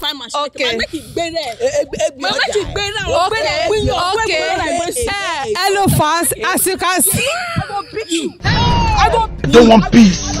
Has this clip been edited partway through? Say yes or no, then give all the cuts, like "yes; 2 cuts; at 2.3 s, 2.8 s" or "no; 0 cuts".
no; 0 cuts